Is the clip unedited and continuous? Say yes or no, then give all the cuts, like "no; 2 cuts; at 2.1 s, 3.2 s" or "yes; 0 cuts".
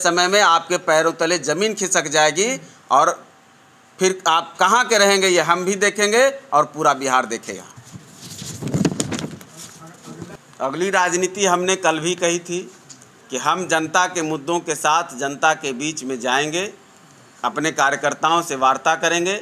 yes; 0 cuts